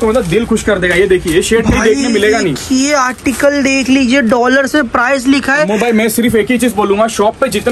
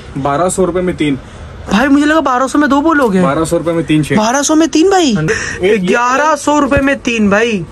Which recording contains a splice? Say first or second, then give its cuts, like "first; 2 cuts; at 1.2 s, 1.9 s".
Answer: second; 1 cut; at 5.2 s